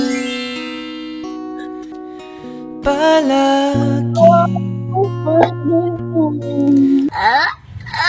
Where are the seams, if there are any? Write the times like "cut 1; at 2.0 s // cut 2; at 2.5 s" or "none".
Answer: none